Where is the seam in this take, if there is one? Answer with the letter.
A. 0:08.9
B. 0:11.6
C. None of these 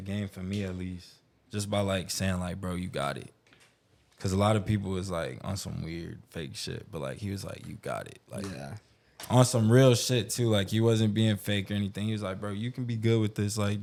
C